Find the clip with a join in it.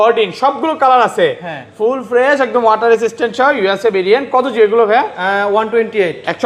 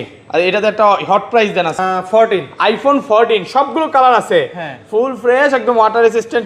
second; 1 cut; at 1.8 s

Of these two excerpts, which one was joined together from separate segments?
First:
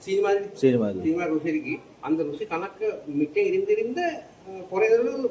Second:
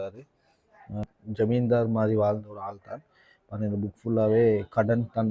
second; 1 cut; at 1.0 s

